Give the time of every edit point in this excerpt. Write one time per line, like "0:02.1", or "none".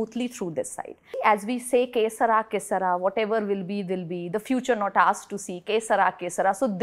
0:01.1